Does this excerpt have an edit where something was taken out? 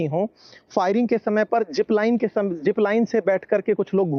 no; 0 cuts

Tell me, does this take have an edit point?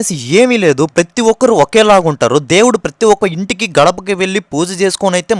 no; 0 cuts

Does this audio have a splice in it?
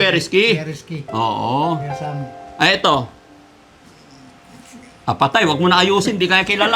no; 0 cuts

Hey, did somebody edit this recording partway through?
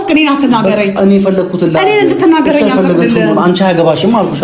no; 0 cuts

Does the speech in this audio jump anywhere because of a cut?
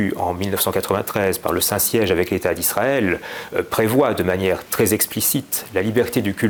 no; 0 cuts

